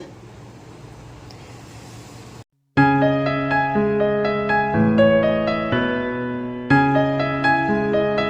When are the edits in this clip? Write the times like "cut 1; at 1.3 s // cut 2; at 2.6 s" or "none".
none